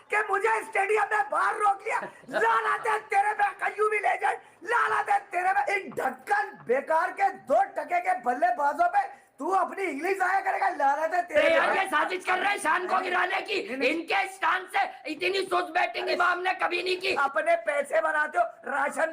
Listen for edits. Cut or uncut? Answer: cut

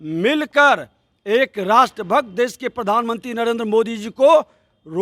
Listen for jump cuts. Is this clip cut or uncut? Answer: uncut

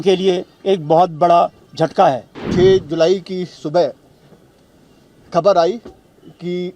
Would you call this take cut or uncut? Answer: cut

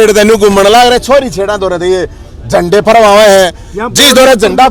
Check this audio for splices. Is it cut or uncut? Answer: uncut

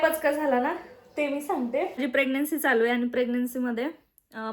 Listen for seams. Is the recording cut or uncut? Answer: cut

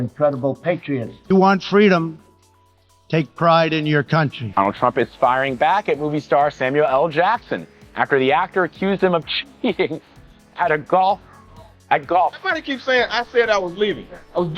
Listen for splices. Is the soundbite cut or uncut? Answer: uncut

